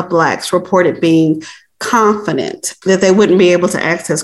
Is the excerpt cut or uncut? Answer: uncut